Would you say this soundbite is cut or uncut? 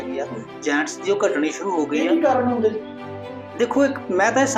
uncut